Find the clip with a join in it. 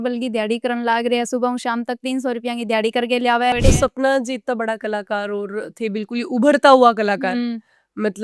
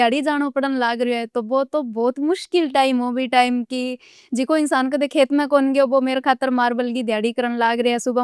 first; 1 cut; at 3.5 s

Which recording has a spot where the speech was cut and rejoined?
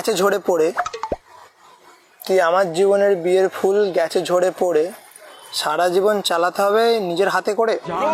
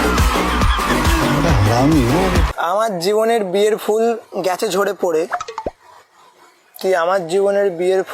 second; 1 cut; at 2.5 s

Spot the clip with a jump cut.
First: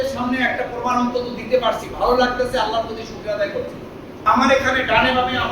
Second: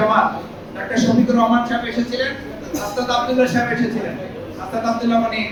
first; 1 cut; at 4.3 s

